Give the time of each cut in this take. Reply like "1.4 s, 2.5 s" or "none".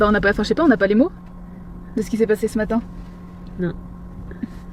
none